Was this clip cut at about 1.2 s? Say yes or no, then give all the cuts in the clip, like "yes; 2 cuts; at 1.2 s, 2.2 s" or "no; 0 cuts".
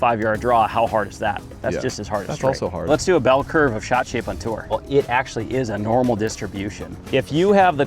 no; 3 cuts; at 2.9 s, 4.8 s, 7.0 s